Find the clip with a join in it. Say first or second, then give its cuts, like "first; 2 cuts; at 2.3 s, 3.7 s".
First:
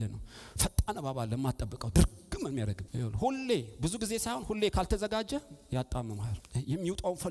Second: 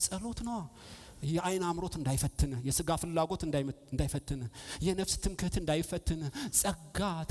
first; 2 cuts; at 2.8 s, 6.4 s